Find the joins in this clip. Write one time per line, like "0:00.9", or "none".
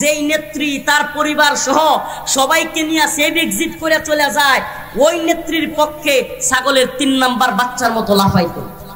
none